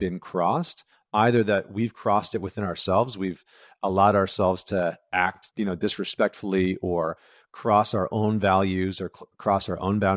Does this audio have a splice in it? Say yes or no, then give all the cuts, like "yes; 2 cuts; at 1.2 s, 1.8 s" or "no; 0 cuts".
yes; 1 cut; at 5.4 s